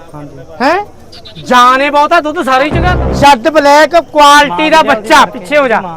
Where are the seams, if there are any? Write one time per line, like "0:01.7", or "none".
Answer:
0:02.8

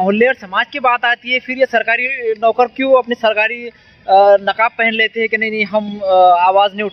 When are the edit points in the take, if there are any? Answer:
none

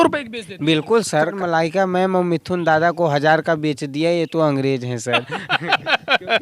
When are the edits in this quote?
0:01.4

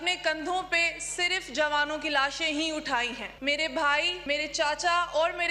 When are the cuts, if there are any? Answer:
0:03.3
0:04.2

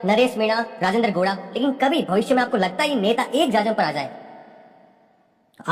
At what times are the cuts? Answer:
none

